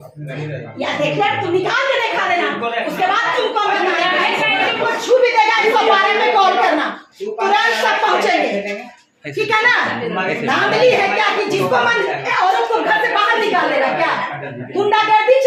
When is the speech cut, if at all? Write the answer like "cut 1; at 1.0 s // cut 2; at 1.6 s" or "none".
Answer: none